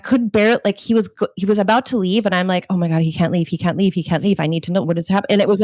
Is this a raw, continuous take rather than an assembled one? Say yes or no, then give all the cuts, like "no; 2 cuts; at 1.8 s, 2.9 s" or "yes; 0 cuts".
yes; 0 cuts